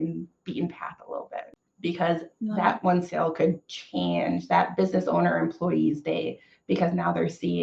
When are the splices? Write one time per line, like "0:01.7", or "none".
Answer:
0:01.6